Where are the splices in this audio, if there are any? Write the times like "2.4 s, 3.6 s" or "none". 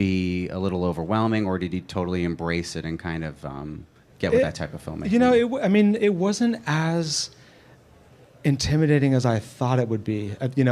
6.5 s